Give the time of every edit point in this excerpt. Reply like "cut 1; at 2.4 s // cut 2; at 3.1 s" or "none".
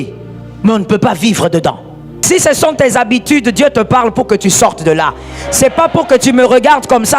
cut 1; at 2.2 s